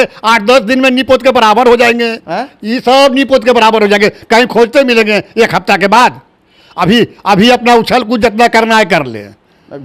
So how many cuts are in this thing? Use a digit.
0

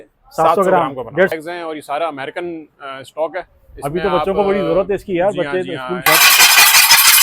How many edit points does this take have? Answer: 2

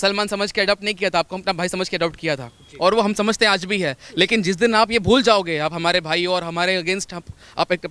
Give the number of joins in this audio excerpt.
0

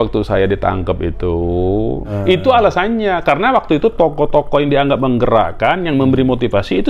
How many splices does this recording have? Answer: 1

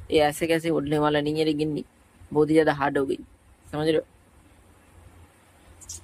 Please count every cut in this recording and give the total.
0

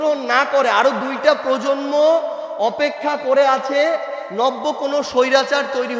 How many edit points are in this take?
0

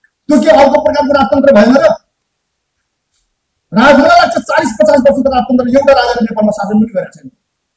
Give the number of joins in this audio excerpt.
0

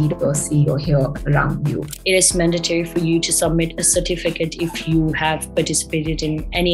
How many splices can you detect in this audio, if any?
1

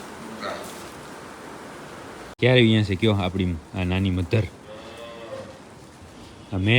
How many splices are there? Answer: 1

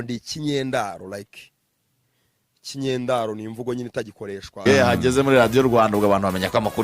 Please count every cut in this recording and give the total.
1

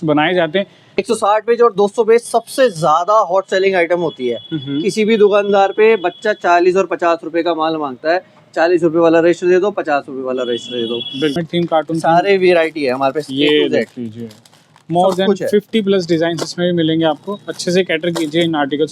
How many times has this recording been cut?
2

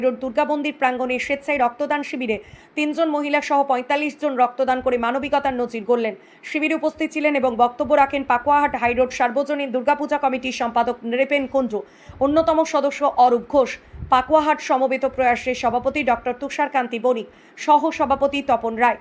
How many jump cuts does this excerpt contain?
0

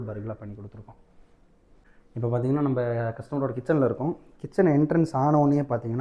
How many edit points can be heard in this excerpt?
0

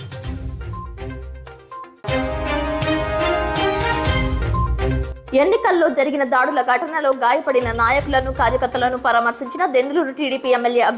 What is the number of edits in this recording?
1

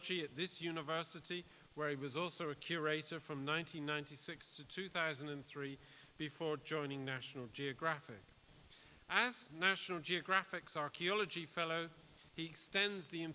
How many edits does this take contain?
1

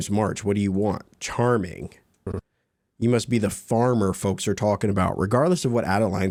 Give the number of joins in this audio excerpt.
0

